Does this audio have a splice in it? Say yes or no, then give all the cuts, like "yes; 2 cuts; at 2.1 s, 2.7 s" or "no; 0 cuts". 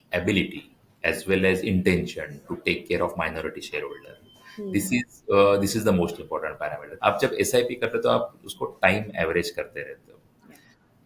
yes; 1 cut; at 6.8 s